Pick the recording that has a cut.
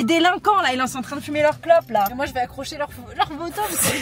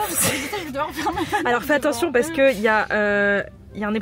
first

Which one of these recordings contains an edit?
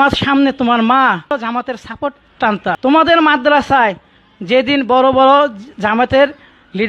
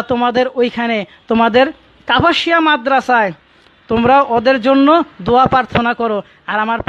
first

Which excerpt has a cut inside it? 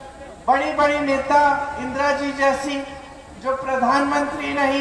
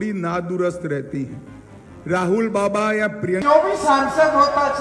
second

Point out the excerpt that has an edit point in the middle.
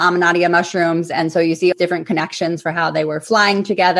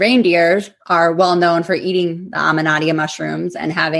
first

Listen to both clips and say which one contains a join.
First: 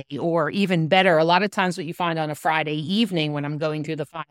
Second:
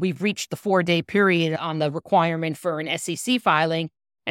second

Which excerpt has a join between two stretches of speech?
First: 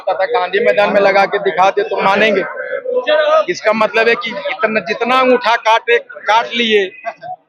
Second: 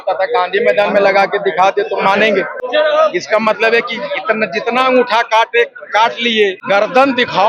second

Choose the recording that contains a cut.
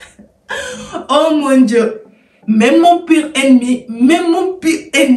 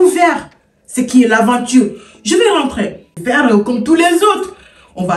second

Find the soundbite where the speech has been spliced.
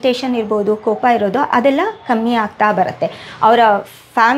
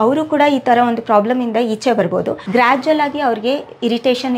second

